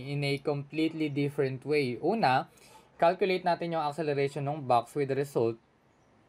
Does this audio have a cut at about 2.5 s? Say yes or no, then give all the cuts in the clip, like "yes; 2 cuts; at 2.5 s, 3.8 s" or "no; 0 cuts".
no; 0 cuts